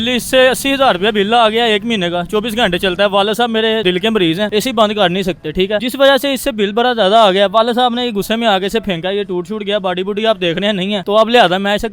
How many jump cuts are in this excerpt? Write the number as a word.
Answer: three